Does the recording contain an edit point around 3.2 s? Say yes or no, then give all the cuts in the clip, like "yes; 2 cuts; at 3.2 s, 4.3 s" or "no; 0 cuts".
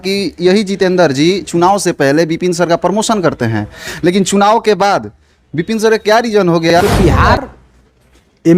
no; 1 cut; at 6.7 s